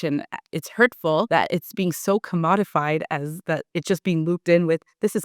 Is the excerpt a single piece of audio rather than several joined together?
no; 1 cut; at 1.3 s

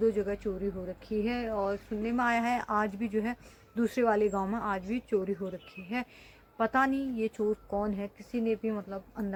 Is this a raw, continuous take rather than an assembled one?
yes; 0 cuts

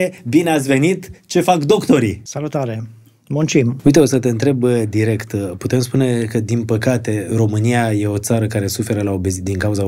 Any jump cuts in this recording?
yes; 2 cuts; at 2.3 s, 3.7 s

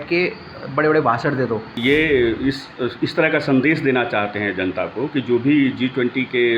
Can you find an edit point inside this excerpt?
yes; 1 cut; at 1.8 s

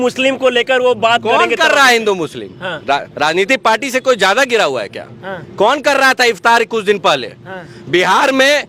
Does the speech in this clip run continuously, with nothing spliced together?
yes; 0 cuts

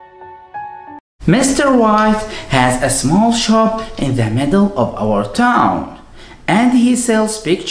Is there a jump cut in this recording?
yes; 1 cut; at 1.0 s

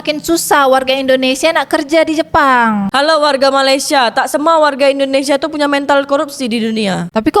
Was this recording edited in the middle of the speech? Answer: yes; 1 cut; at 2.9 s

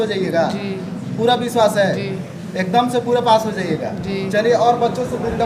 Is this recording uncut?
yes; 0 cuts

